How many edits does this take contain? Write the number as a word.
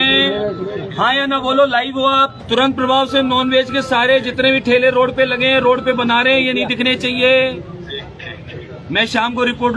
one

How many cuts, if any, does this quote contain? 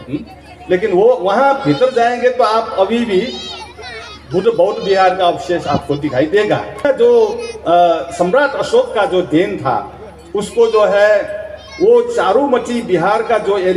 one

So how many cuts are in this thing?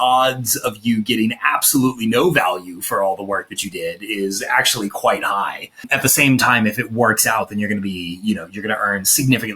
one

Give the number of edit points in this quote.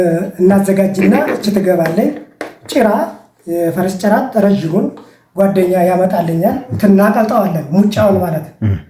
one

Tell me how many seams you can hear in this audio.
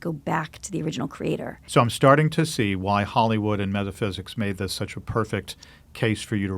one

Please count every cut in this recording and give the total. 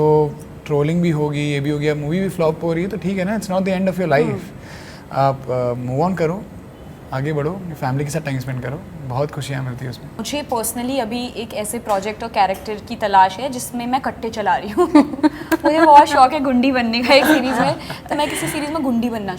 one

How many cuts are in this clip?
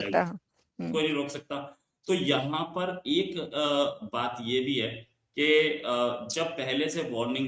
zero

